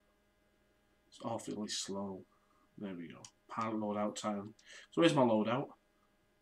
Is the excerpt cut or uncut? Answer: uncut